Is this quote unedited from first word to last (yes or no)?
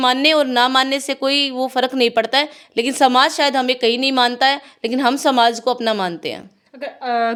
yes